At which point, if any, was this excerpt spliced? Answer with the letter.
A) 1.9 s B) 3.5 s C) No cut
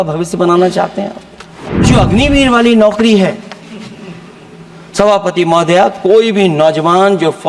A